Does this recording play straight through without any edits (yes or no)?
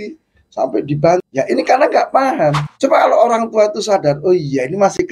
no